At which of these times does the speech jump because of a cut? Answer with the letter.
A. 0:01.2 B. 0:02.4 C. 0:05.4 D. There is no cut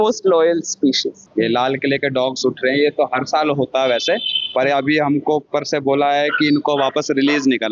A